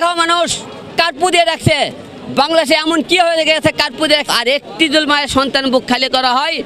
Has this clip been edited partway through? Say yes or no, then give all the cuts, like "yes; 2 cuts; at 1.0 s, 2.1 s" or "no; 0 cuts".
no; 0 cuts